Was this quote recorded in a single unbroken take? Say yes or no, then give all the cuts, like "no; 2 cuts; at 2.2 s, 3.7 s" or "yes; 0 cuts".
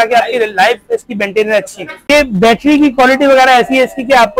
no; 1 cut; at 2.1 s